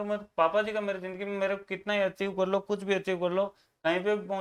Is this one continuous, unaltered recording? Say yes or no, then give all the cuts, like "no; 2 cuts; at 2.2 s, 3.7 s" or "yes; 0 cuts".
yes; 0 cuts